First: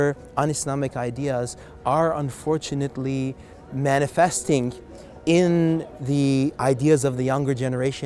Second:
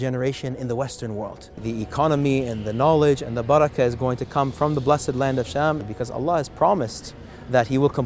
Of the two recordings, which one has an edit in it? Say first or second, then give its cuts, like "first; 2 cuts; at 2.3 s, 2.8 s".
second; 2 cuts; at 1.6 s, 5.9 s